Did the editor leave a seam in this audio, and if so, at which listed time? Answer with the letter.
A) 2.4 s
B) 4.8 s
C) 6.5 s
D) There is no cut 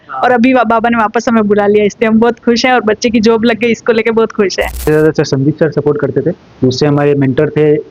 B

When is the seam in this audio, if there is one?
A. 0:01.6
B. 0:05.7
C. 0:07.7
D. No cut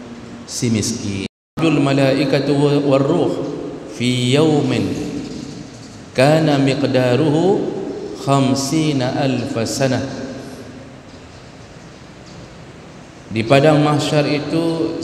A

